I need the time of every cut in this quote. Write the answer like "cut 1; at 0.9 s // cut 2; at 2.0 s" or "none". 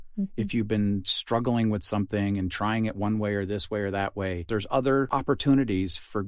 cut 1; at 4.4 s // cut 2; at 5.1 s